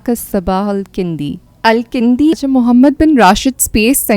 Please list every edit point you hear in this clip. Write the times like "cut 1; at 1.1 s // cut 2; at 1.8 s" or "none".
cut 1; at 2.4 s